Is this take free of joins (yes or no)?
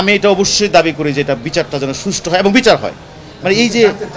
yes